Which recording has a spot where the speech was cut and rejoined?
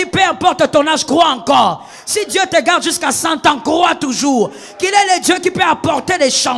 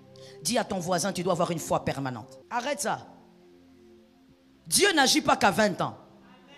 second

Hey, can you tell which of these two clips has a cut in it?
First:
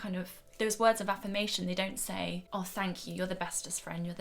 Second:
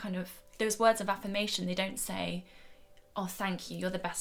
first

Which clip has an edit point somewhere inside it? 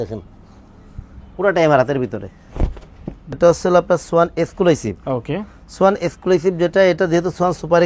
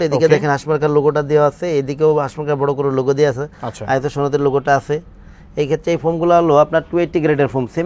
first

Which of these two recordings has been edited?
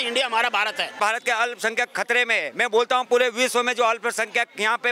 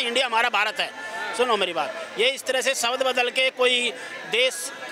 first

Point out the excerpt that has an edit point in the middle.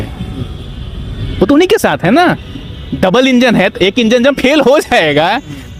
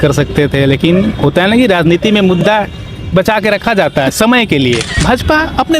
second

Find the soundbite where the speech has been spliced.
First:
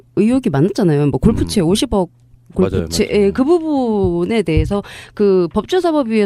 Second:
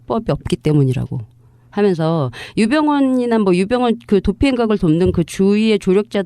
second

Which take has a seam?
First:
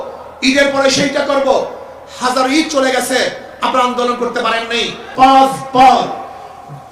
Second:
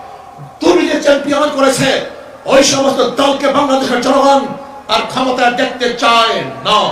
first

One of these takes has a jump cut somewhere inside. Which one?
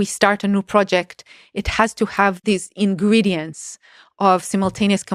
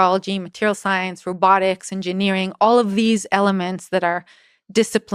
first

